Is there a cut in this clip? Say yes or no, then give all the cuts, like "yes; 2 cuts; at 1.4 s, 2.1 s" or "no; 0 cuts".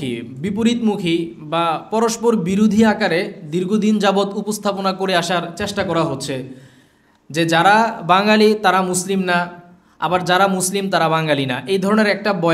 no; 0 cuts